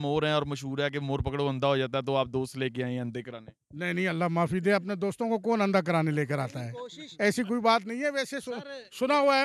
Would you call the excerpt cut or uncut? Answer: uncut